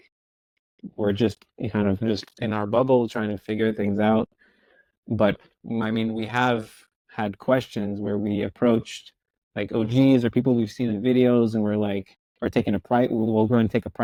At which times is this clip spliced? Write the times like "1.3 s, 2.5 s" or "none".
none